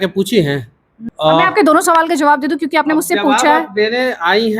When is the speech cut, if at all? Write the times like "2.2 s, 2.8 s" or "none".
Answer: 1.0 s